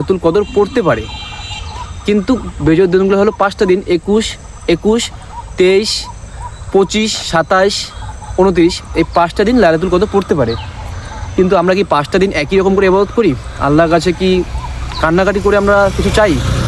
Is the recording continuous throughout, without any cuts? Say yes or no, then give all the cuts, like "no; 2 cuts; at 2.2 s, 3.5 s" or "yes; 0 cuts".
yes; 0 cuts